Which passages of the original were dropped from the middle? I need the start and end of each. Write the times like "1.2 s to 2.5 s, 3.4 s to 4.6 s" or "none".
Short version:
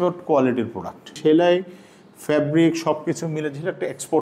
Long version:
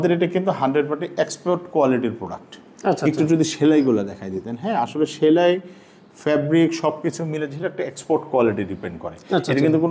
2.6 s to 5.1 s